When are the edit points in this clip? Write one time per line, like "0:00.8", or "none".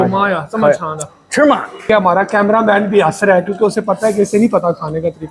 0:01.9